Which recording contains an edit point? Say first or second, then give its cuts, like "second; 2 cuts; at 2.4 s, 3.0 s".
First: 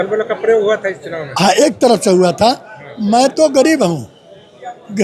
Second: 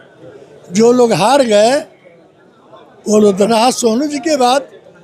second; 1 cut; at 3.5 s